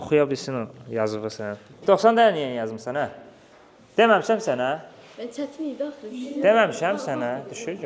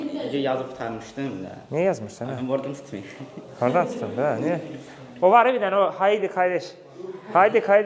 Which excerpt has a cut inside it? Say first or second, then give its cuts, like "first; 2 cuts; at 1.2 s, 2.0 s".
first; 1 cut; at 1.7 s